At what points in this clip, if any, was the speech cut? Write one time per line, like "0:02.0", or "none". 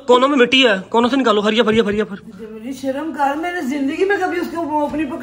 none